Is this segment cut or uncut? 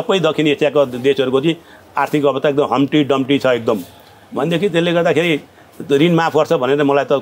uncut